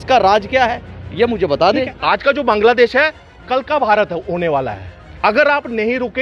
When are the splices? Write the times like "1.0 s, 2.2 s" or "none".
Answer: 1.9 s